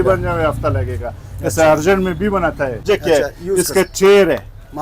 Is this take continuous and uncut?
no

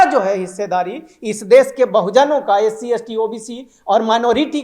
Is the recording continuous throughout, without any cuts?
yes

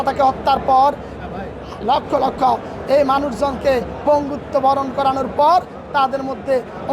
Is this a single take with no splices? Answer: yes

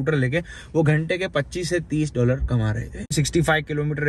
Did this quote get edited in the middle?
yes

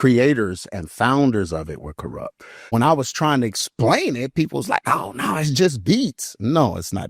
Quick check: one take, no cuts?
no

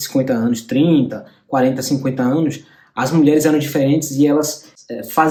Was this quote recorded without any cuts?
yes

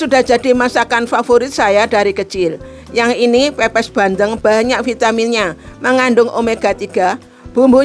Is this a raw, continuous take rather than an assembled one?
yes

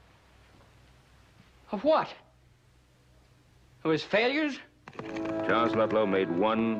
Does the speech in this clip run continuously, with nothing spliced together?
yes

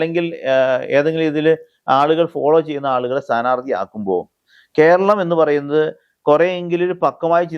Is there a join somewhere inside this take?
no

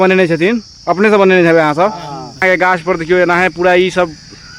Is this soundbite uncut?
no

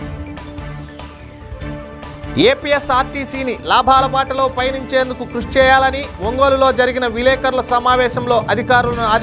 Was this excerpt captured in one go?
no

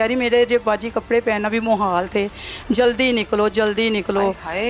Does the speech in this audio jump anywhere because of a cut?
no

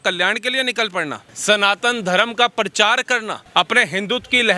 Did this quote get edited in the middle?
yes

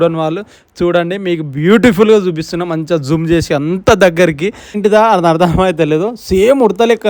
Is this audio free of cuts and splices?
no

